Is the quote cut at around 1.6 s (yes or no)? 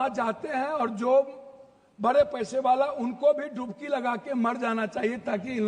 no